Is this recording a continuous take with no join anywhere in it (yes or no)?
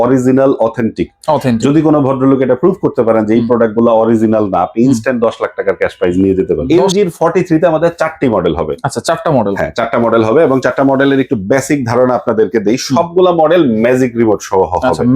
no